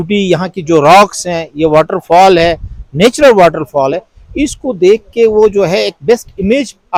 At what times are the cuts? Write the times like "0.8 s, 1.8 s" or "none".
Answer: none